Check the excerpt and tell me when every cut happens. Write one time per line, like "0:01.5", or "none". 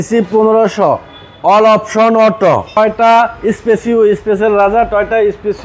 0:02.8